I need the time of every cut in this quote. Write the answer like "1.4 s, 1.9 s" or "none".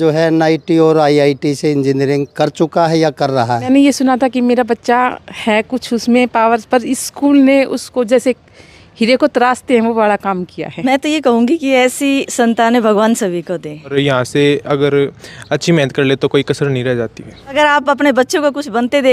3.7 s, 10.9 s, 13.9 s, 17.6 s